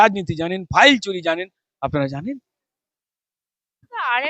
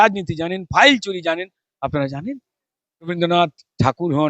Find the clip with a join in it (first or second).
second